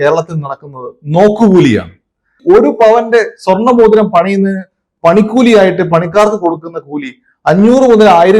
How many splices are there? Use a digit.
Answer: 1